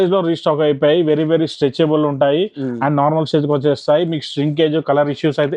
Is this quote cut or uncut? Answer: uncut